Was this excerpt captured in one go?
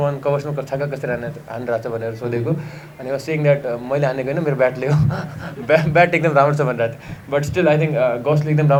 yes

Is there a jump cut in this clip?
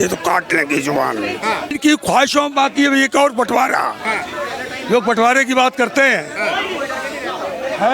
yes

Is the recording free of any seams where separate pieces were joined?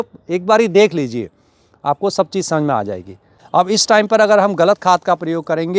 no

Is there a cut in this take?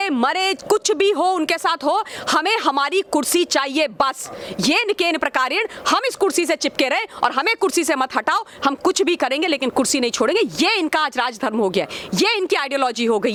no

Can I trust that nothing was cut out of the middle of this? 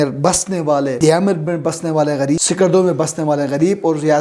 no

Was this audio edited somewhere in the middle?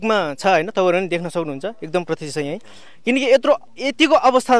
no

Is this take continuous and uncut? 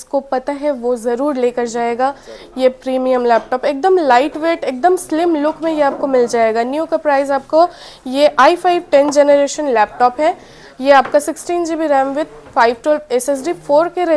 yes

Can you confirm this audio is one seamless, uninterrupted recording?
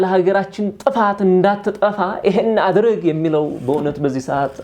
yes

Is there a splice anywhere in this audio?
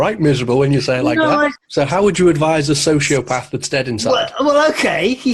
yes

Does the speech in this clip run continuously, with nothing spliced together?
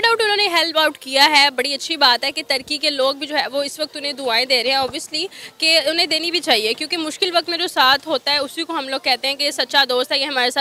yes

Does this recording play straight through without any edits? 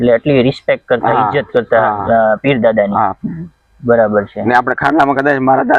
yes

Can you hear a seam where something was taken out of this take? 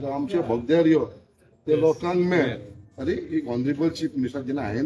no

